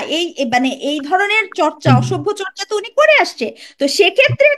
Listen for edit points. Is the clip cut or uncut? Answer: uncut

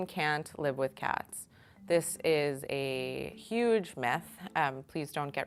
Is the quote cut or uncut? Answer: uncut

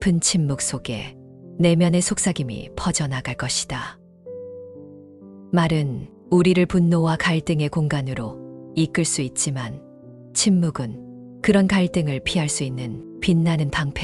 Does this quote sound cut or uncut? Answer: uncut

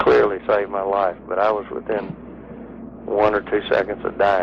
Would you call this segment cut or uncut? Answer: uncut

